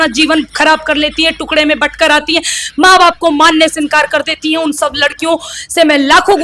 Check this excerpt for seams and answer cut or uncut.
uncut